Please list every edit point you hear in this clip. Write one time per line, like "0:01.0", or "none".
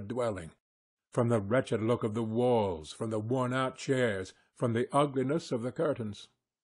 none